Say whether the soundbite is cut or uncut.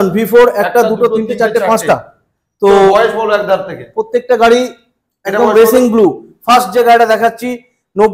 uncut